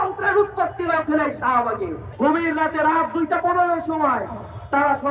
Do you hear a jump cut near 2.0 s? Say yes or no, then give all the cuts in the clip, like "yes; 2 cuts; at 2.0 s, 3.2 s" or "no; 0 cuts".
yes; 1 cut; at 2.0 s